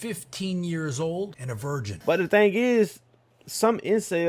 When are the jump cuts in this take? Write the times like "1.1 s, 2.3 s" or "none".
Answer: 2.0 s